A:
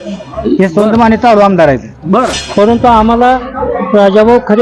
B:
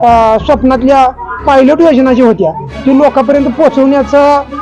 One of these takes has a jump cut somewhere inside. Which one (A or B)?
A